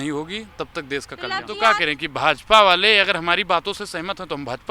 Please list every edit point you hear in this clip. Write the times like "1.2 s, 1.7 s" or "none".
1.5 s